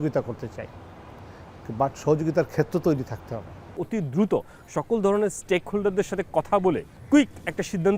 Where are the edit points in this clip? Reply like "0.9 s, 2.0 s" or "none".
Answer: 3.5 s, 6.9 s